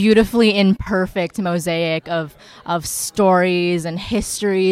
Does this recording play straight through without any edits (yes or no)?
yes